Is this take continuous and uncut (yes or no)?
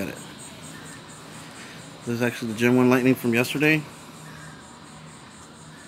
yes